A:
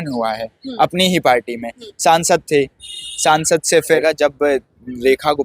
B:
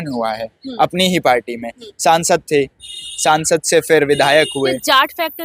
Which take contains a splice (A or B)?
A